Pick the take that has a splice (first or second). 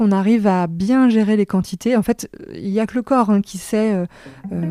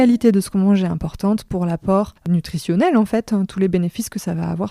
second